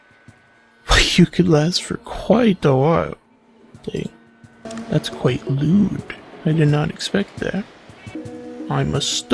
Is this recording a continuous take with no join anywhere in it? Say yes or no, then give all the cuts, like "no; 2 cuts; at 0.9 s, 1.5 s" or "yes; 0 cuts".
no; 2 cuts; at 4.7 s, 8.2 s